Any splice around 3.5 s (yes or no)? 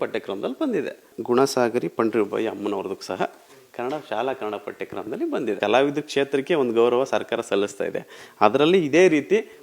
no